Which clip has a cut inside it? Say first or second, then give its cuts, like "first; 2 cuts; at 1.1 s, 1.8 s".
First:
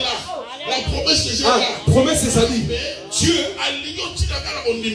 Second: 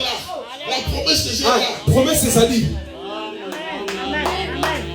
first; 1 cut; at 2.7 s